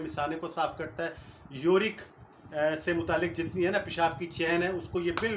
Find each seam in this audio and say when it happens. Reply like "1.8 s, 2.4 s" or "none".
none